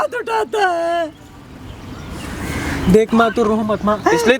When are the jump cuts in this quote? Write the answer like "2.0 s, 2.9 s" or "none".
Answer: none